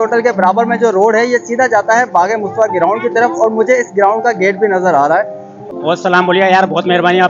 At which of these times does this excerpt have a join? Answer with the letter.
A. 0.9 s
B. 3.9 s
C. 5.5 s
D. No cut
C